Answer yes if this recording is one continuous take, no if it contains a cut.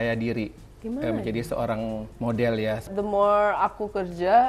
no